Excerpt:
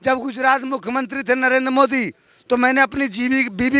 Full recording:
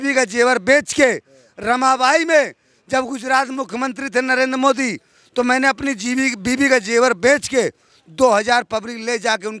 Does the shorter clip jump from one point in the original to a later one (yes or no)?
no